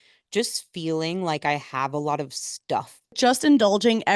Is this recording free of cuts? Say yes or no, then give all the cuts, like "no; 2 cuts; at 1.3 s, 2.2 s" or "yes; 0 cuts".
no; 1 cut; at 3.1 s